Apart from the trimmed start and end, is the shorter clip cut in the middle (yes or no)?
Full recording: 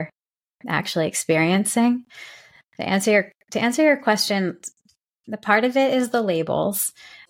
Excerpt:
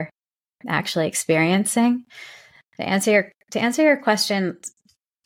no